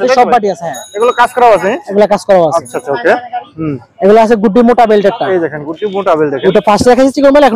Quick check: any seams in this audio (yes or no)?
no